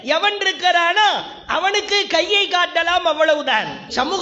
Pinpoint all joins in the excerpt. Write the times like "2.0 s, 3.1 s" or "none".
none